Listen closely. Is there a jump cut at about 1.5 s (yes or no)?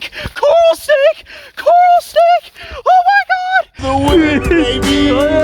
no